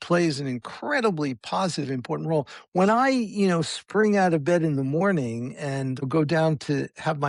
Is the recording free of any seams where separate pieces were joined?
yes; 0 cuts

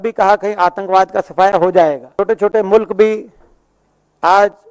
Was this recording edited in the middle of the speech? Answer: yes; 1 cut; at 2.1 s

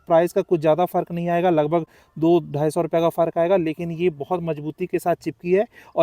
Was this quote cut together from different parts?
no; 0 cuts

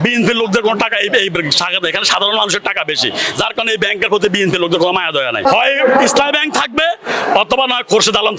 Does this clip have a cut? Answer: yes; 1 cut; at 5.5 s

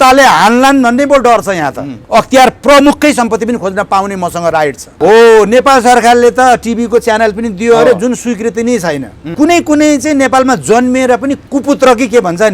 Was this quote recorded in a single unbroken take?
no; 4 cuts; at 2.0 s, 4.9 s, 9.3 s, 11.4 s

